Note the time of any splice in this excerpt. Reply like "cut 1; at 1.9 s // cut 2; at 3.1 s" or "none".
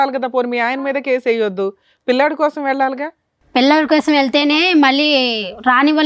none